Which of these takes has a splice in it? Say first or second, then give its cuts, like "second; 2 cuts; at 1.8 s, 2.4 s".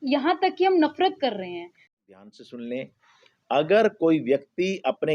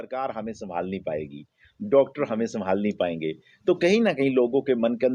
first; 1 cut; at 1.9 s